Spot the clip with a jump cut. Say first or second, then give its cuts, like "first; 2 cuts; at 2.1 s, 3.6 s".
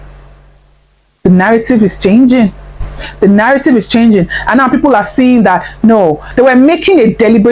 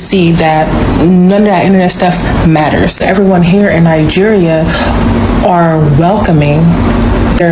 first; 1 cut; at 6.2 s